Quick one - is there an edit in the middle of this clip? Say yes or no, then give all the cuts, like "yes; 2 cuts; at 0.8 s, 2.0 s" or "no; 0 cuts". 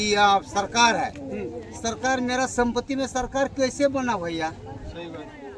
no; 0 cuts